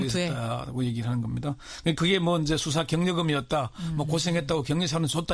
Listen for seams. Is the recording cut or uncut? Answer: cut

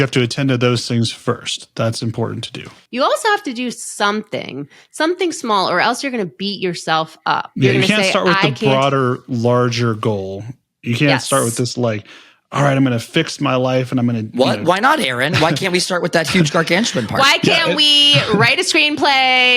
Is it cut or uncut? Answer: cut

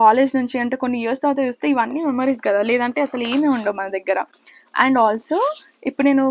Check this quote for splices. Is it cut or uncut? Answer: uncut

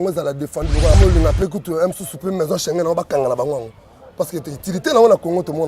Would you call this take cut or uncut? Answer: cut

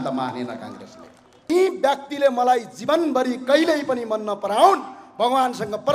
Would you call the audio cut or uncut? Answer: cut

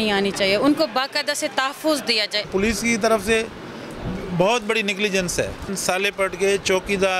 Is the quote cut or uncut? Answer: cut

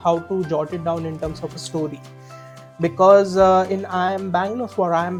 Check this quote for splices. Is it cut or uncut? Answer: uncut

